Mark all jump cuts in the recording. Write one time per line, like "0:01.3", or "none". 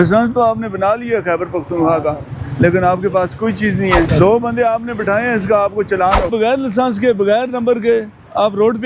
0:04.1
0:06.3